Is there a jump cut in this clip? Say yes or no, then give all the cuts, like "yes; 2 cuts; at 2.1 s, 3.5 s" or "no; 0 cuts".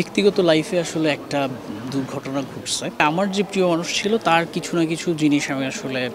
yes; 1 cut; at 3.0 s